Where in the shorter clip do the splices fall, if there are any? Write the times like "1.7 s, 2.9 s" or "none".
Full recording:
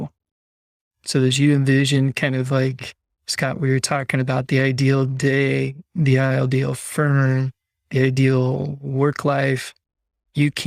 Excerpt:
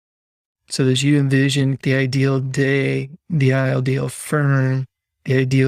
1.8 s